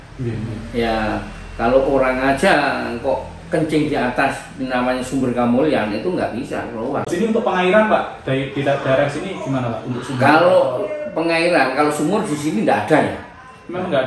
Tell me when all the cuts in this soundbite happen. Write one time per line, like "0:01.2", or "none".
0:07.1